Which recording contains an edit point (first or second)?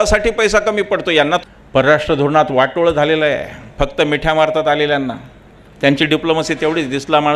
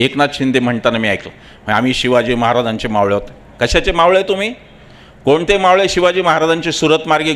first